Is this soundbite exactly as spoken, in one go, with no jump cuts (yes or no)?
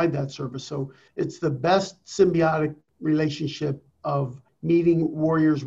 no